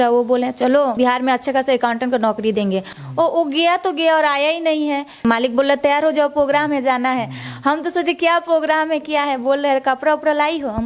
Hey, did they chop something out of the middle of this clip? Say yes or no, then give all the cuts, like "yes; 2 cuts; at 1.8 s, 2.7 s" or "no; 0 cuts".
yes; 3 cuts; at 0.9 s, 3.0 s, 5.2 s